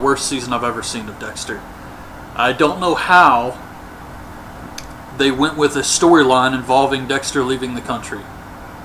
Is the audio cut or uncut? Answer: uncut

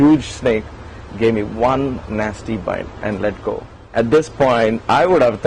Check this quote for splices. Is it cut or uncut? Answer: cut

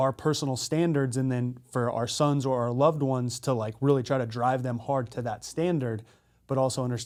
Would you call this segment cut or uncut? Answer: uncut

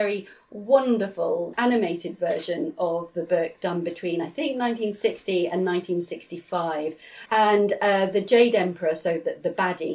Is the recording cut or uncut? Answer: cut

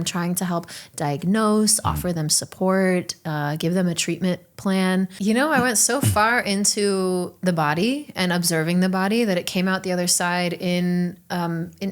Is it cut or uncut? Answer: cut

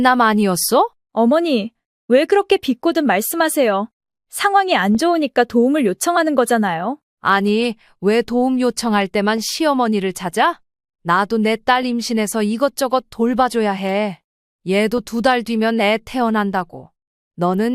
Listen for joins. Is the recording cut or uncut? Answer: cut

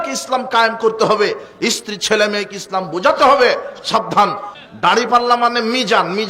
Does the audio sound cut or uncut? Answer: cut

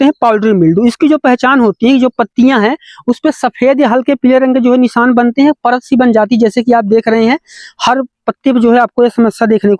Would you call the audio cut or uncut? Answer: uncut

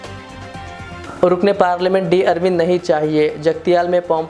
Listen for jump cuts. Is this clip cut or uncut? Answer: cut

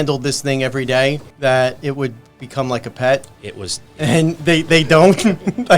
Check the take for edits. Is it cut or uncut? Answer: cut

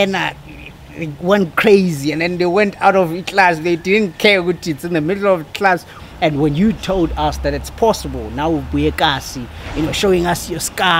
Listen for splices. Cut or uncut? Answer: cut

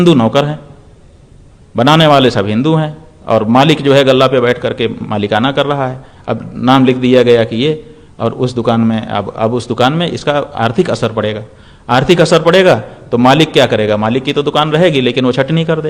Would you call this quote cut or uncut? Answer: uncut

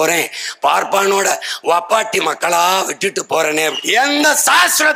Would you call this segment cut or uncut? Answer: cut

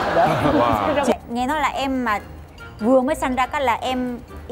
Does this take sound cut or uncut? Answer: cut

